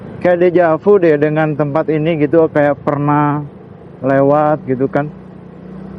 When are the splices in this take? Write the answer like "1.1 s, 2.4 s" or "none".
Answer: 5.1 s